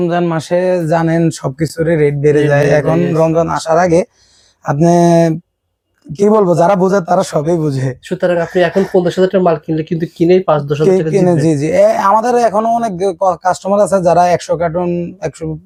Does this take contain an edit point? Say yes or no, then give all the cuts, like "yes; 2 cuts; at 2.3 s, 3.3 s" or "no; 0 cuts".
no; 0 cuts